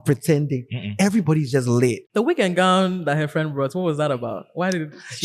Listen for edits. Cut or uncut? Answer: cut